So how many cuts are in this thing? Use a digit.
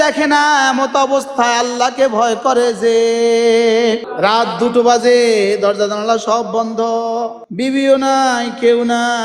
2